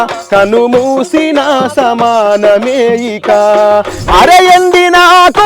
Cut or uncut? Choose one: cut